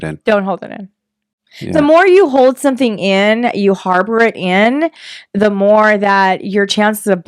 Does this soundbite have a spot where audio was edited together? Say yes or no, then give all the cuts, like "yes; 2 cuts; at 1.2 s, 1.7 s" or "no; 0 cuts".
no; 0 cuts